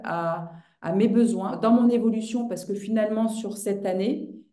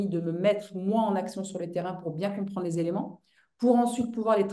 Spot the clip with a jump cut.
first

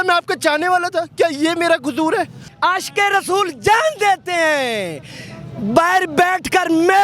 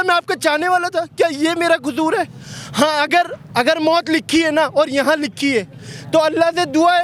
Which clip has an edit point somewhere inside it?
first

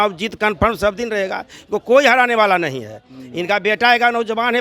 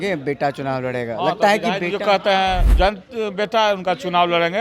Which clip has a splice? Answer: second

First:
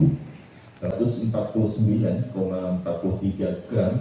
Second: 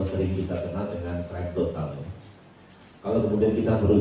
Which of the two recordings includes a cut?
first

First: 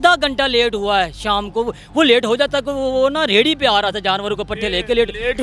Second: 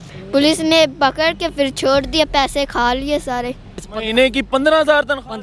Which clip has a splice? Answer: second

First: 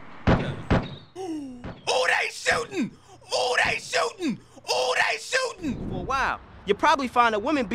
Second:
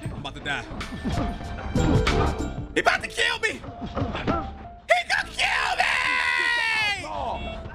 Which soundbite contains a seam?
first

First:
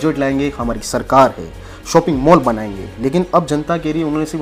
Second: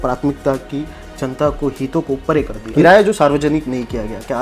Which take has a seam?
second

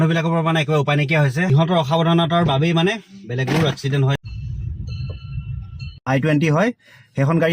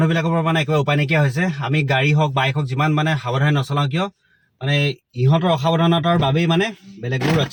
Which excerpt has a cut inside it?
first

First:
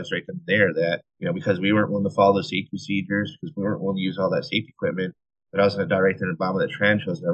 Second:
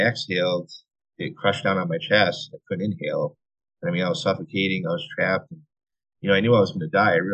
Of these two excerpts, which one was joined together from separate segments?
first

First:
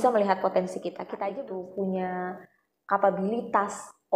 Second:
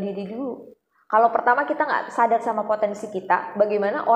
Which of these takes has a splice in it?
first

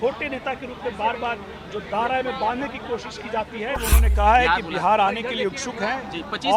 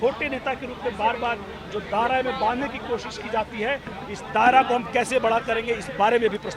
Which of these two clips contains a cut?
first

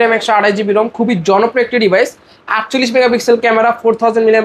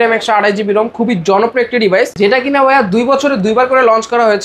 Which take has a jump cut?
second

